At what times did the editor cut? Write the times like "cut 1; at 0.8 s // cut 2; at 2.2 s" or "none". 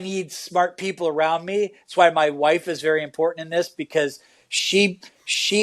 none